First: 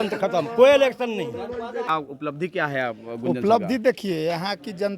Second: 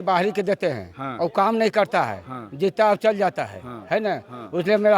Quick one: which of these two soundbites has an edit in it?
first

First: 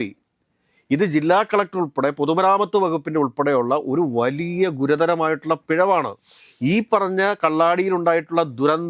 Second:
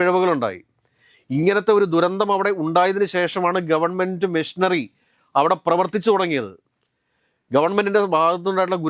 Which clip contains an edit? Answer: first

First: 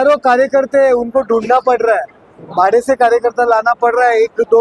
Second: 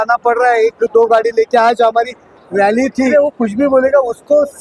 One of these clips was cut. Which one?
second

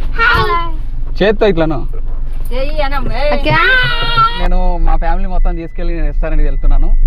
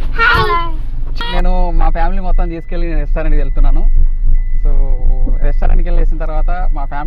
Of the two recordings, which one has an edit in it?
second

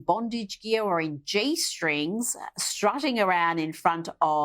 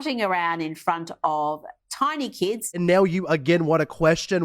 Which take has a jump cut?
second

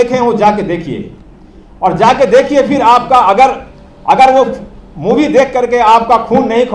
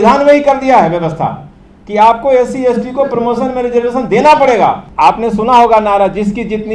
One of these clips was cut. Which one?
second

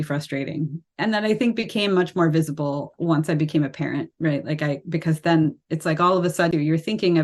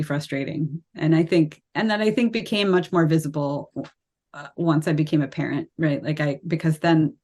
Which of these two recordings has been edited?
first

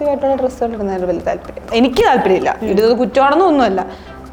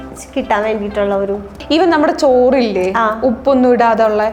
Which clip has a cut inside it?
second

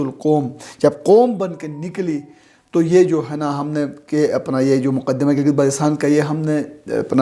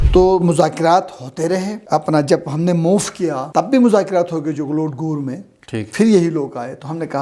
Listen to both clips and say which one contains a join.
second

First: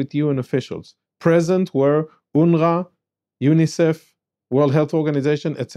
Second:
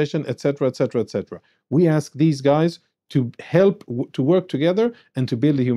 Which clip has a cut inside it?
second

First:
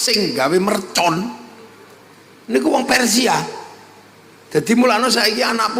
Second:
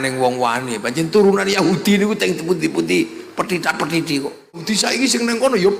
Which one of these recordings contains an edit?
second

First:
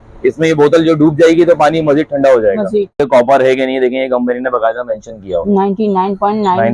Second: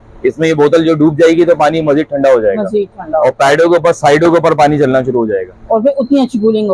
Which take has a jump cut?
first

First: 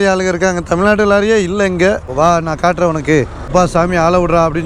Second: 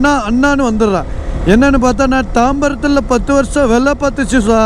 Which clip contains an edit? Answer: first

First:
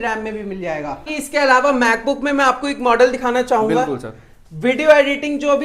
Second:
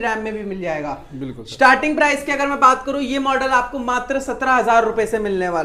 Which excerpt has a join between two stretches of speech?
first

